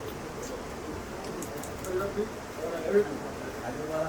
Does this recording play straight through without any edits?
yes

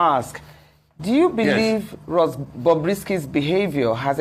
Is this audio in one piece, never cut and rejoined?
yes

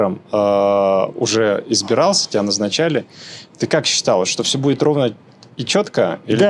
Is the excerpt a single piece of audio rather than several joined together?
yes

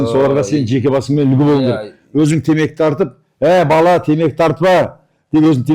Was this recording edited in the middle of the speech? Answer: no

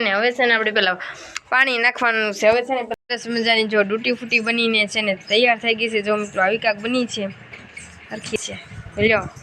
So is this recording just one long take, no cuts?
no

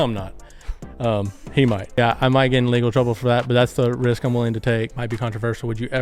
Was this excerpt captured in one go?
no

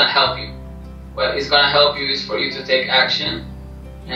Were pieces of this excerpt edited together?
no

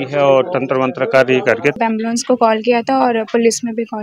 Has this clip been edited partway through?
yes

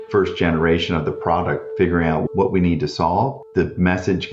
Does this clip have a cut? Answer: no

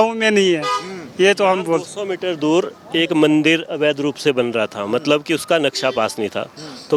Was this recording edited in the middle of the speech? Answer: no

